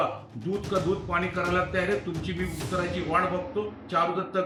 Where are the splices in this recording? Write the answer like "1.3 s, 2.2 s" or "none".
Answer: none